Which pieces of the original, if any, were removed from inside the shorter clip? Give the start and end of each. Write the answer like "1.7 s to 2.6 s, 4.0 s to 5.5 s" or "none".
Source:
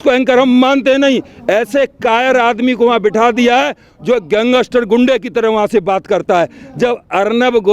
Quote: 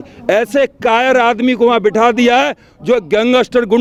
none

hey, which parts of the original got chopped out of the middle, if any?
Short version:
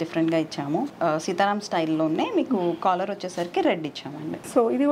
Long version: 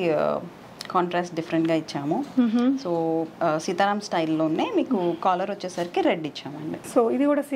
2.3 s to 3.3 s

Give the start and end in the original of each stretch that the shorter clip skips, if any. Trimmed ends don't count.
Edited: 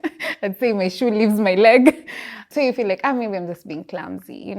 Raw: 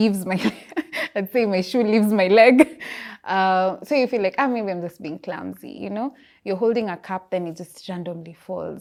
3.2 s to 3.8 s

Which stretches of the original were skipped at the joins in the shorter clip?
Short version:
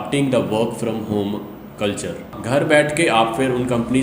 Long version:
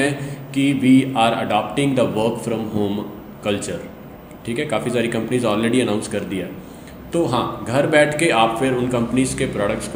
4.0 s to 7.6 s

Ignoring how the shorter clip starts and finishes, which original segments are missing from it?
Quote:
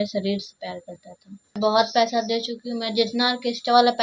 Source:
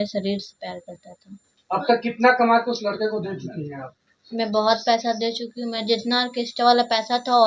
1.6 s to 4.5 s

